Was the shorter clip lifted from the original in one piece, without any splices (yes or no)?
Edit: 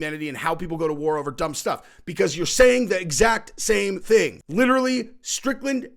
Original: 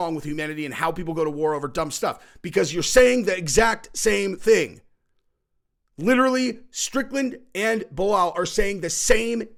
no